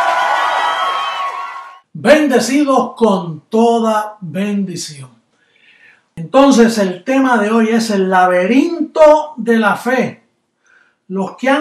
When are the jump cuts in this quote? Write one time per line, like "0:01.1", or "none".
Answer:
0:01.2